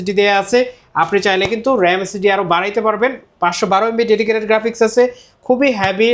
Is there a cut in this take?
no; 0 cuts

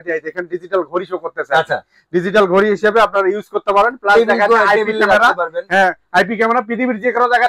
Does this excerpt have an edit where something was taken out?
no; 0 cuts

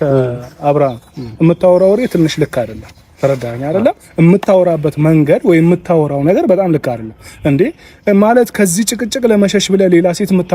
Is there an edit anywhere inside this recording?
no; 0 cuts

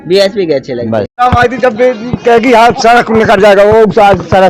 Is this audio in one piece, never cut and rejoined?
no; 1 cut; at 1.1 s

